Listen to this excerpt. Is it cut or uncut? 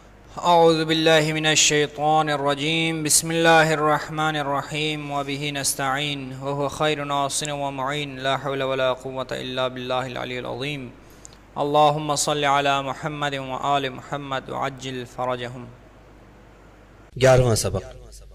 cut